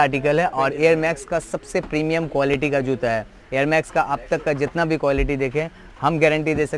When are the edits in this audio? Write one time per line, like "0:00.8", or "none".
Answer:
none